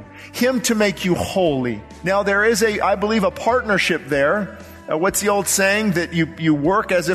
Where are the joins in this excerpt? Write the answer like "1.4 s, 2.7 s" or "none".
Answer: 1.9 s